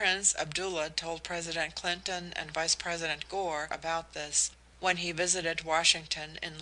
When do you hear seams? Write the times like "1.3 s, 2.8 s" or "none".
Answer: 3.8 s